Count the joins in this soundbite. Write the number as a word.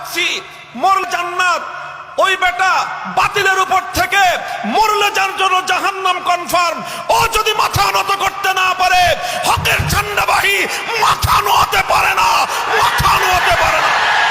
one